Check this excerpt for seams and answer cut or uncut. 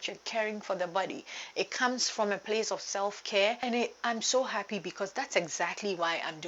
cut